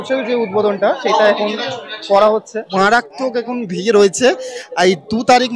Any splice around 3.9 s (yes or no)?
no